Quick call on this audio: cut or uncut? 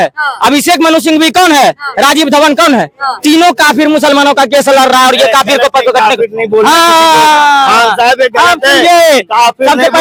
uncut